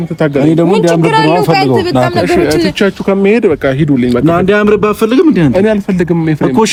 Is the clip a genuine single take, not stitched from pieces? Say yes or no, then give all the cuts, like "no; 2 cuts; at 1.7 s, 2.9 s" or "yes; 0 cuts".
yes; 0 cuts